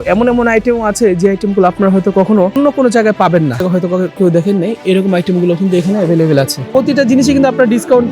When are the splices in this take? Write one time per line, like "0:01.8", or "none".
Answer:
0:02.6
0:03.6
0:06.7